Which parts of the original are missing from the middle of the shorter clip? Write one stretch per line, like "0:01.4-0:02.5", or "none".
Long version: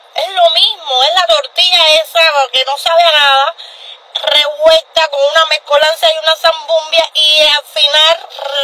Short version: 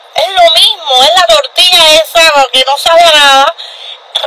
none